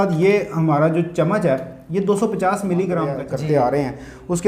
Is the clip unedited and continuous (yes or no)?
no